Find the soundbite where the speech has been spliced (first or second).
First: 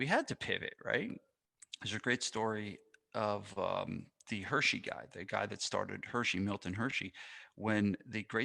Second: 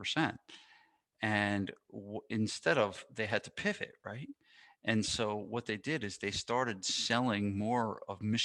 first